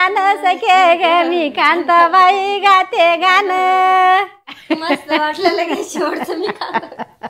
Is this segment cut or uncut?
cut